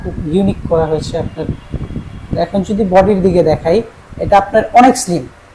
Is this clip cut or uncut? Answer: uncut